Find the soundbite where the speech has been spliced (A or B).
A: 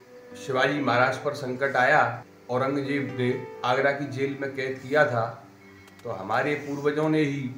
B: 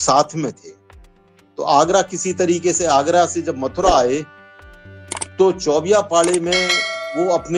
A